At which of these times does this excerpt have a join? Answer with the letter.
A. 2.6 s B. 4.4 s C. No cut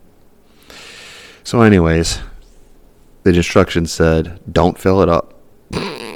C